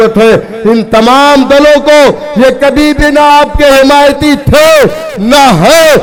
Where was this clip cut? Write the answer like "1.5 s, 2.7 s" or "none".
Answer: none

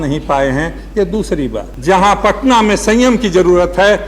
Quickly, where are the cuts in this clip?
1.7 s

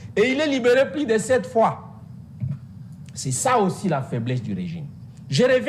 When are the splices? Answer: none

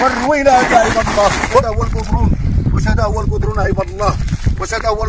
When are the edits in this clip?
none

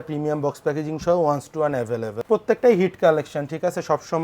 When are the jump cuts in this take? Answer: 2.2 s

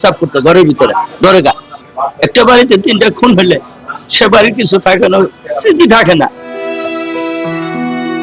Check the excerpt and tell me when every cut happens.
1.7 s, 6.5 s

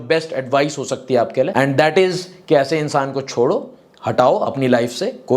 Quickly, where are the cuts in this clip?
1.5 s

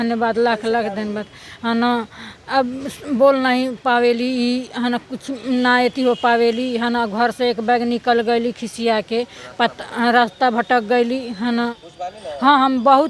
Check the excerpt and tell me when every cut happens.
11.9 s

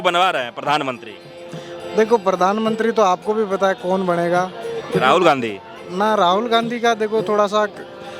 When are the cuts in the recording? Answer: none

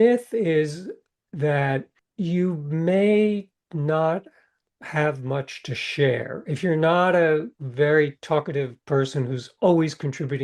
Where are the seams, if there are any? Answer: 2.0 s, 4.7 s

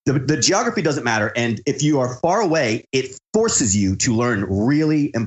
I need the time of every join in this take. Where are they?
none

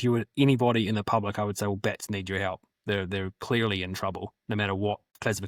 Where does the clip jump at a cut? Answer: none

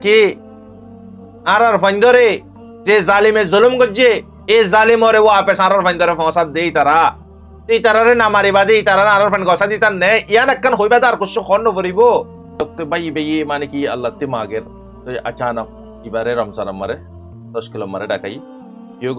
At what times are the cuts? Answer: 12.6 s

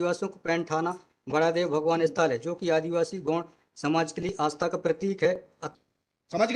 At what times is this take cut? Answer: 5.7 s

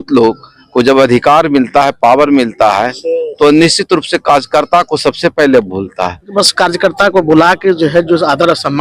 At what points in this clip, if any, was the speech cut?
6.3 s

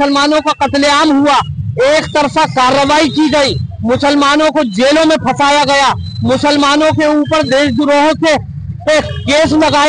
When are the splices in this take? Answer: none

